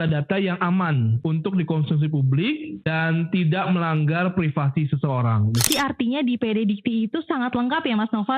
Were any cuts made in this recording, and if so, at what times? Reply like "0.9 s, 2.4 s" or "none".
1.1 s, 2.7 s, 5.7 s